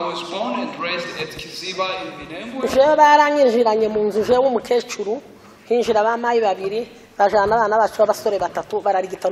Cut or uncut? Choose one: uncut